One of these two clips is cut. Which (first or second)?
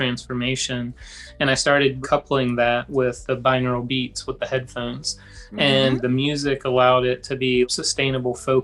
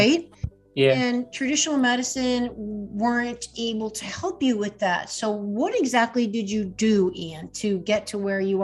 first